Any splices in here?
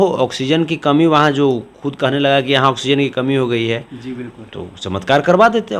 no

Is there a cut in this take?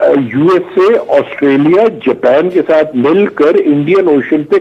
no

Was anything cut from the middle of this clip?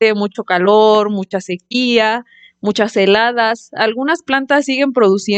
no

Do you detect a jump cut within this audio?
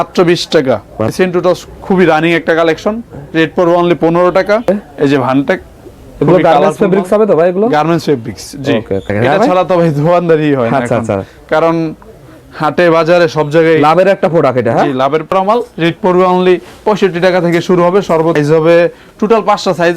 yes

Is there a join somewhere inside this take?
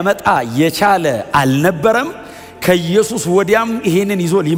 no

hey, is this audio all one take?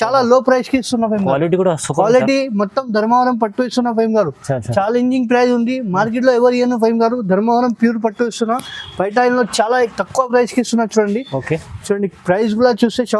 yes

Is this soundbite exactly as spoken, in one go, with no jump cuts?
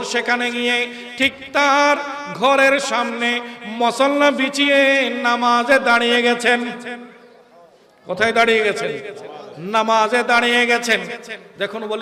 yes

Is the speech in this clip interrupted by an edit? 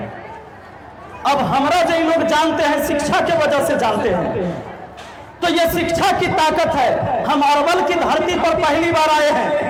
no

